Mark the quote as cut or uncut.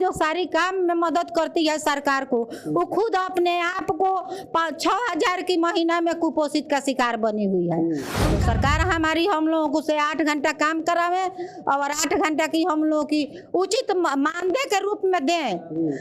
cut